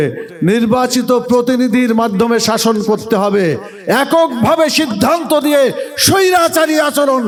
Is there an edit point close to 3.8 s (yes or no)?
no